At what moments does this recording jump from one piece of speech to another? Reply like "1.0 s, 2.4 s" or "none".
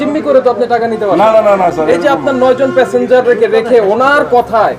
none